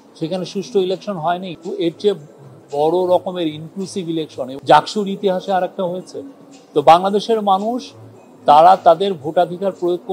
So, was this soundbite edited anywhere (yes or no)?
yes